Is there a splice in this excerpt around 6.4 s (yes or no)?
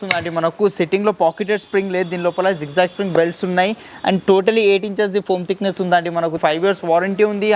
yes